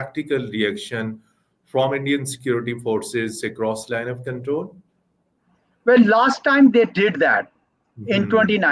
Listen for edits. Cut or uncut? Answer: uncut